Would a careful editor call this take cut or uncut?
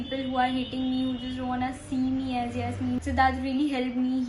cut